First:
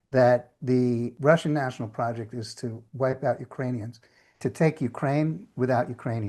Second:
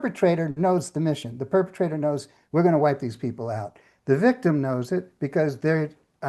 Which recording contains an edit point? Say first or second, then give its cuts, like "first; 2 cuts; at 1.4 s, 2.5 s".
first; 2 cuts; at 1.1 s, 4.4 s